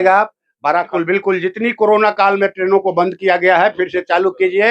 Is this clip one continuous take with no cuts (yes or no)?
no